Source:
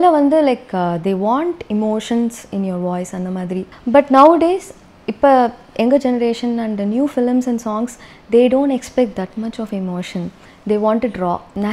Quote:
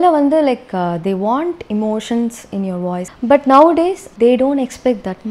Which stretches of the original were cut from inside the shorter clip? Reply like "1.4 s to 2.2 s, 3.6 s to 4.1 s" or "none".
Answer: 3.1 s to 3.7 s, 4.7 s to 8.2 s